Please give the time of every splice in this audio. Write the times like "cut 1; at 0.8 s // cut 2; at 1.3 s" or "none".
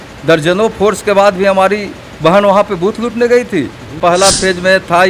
cut 1; at 4.0 s